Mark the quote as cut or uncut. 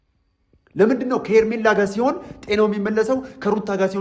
uncut